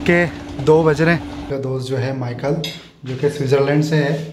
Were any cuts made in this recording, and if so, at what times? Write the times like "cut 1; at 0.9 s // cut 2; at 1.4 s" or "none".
cut 1; at 1.5 s